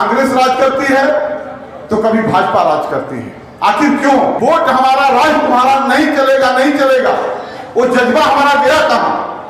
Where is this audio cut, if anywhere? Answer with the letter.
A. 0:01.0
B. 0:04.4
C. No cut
B